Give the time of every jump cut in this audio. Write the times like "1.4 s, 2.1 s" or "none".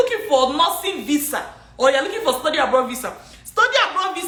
none